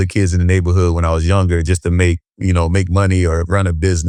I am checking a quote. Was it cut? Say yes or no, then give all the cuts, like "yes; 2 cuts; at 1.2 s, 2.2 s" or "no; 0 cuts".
no; 0 cuts